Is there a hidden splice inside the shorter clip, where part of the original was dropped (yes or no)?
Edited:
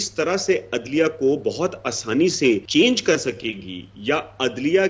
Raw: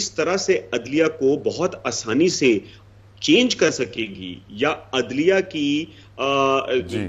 yes